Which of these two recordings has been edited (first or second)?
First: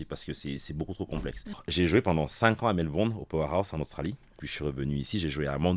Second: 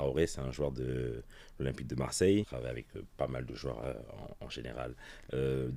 first